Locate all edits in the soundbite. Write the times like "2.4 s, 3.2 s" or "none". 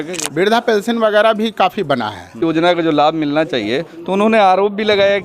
2.4 s